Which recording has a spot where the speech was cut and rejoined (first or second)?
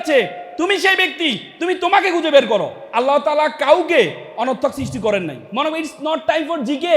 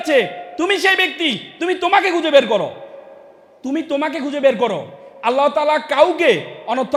first